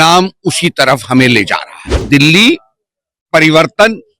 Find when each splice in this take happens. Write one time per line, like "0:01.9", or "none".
0:02.0